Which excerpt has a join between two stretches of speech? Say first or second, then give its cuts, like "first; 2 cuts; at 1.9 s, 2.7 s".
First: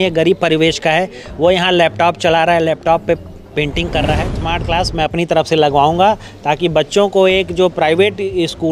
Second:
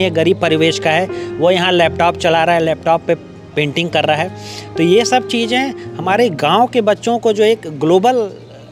first; 1 cut; at 4.5 s